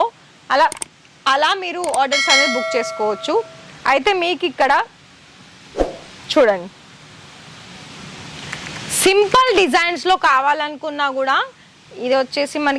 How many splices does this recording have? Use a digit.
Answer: 0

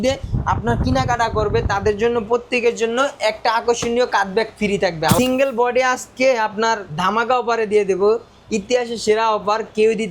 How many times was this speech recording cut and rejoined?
1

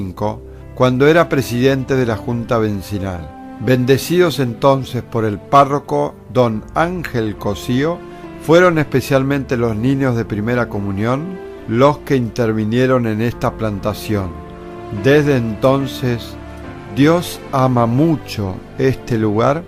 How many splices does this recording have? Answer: 1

